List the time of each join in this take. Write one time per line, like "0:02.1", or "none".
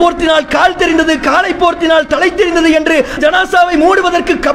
0:03.1